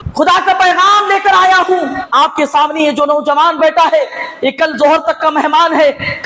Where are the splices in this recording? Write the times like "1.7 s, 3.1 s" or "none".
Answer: 2.0 s